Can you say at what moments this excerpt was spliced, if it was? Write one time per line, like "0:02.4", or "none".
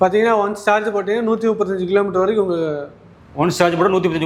none